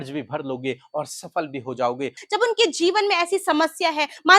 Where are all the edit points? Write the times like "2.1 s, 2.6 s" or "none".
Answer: 2.2 s